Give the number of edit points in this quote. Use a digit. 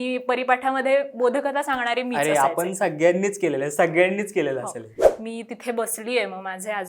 1